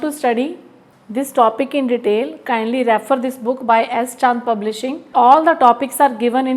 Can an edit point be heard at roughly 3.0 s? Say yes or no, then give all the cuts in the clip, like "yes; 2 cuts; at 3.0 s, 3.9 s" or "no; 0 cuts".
no; 1 cut; at 4.9 s